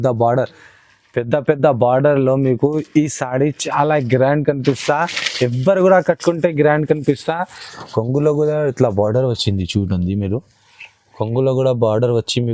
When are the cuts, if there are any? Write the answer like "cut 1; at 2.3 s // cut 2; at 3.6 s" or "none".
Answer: cut 1; at 7.7 s